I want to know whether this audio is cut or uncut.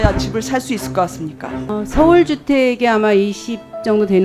cut